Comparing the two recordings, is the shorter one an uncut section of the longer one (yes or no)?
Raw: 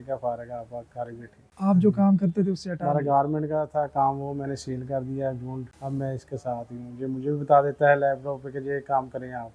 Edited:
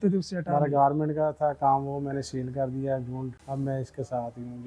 yes